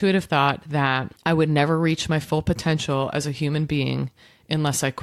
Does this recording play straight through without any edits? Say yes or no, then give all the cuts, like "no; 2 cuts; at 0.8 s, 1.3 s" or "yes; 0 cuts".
no; 1 cut; at 1.1 s